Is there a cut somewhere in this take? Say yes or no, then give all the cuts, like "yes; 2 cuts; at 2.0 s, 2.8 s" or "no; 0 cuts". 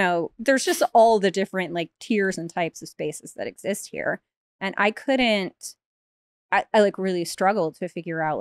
no; 0 cuts